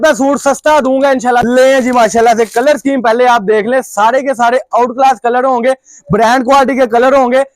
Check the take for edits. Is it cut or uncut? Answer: cut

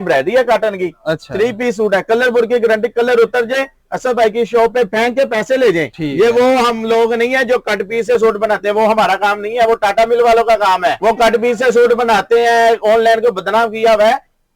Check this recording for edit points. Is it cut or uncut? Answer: uncut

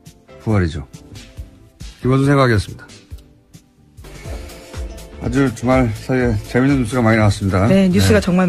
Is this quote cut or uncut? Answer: cut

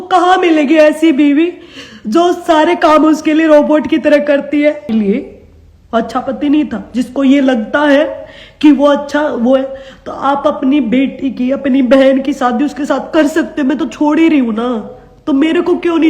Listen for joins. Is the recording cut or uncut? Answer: cut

